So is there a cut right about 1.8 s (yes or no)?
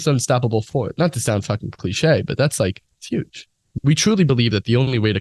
no